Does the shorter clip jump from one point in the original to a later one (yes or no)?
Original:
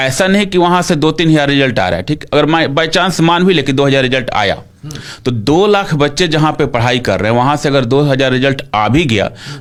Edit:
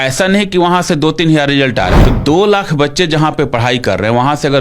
yes